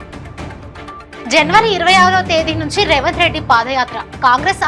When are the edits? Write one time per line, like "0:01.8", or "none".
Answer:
0:01.1

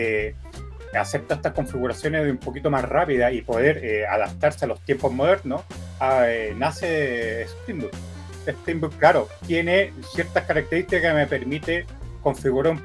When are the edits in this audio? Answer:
none

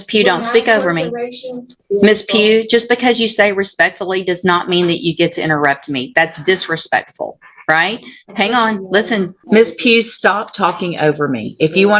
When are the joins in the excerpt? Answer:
0:01.7
0:09.4

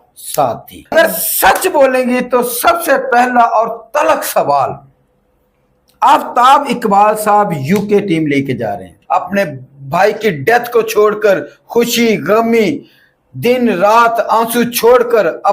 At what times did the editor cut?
0:00.9
0:08.9

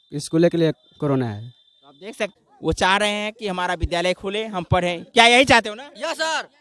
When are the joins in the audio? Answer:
0:02.3

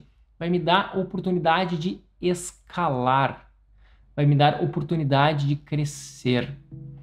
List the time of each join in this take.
none

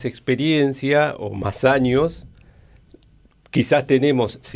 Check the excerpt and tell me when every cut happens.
none

